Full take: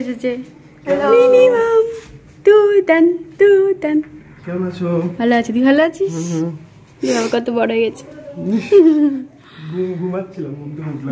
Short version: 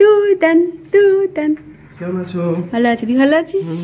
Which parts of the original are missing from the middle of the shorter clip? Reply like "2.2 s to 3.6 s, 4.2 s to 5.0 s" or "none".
none

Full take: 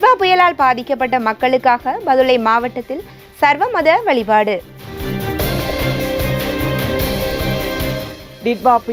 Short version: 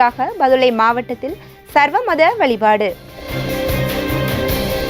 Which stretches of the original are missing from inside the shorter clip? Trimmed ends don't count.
4.9 s to 5.7 s

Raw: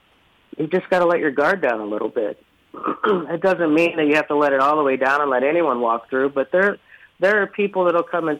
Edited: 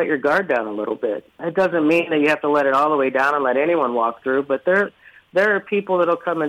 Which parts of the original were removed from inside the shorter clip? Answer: 2.6 s to 3.3 s

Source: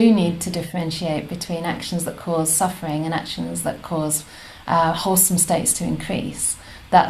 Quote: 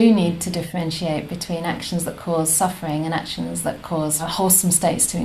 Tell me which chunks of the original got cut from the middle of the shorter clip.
4.3 s to 5.0 s

